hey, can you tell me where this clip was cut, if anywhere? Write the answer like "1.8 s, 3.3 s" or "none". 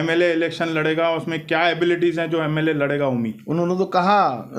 none